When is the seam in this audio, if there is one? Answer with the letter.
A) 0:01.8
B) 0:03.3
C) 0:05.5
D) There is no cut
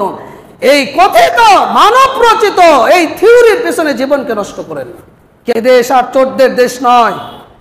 C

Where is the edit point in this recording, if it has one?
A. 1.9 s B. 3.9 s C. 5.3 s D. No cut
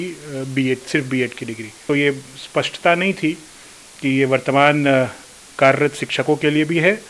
A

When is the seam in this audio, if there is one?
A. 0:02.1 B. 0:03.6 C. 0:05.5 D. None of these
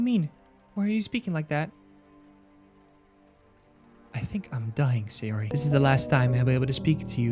C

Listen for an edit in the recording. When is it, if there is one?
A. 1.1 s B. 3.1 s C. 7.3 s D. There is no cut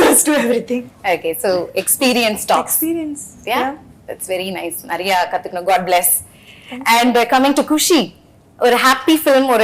D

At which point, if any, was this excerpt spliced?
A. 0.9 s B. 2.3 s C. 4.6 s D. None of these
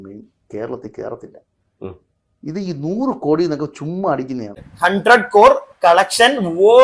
C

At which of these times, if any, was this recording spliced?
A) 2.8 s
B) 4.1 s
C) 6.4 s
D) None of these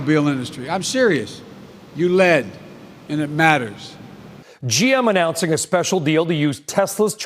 B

